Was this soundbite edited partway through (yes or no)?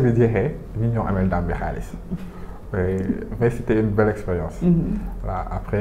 no